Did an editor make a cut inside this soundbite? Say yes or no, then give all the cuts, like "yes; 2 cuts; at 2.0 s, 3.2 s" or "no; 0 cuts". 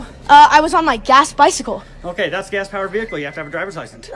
no; 0 cuts